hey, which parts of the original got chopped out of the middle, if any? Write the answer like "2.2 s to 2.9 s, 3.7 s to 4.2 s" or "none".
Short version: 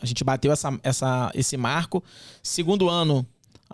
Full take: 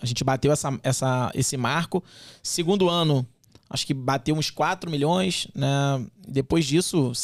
none